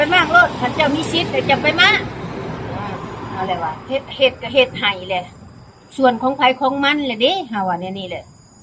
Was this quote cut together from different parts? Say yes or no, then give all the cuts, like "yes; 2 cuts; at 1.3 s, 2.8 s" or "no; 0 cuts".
yes; 1 cut; at 3.8 s